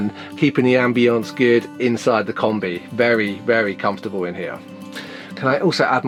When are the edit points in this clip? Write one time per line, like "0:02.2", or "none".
none